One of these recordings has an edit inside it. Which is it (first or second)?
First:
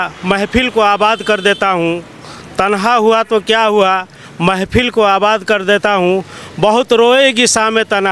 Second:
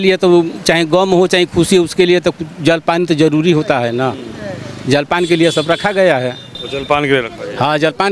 second